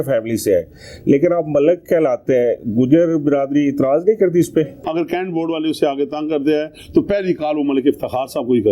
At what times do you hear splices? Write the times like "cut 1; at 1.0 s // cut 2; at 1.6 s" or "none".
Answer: cut 1; at 4.8 s